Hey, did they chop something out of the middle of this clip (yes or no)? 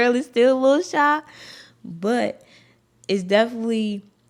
no